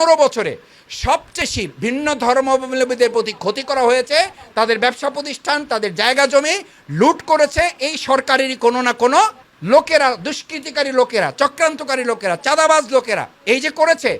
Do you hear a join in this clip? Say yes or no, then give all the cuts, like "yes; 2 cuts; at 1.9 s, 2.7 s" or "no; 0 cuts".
yes; 1 cut; at 1.4 s